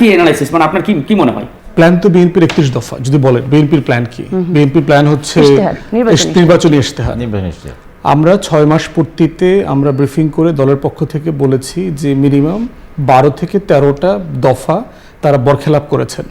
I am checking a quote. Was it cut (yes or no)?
yes